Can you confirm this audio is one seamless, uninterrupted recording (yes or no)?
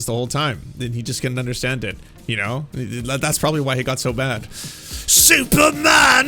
yes